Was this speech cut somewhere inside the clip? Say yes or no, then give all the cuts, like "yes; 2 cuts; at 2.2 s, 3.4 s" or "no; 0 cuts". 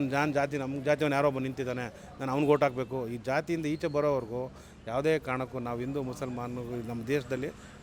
no; 0 cuts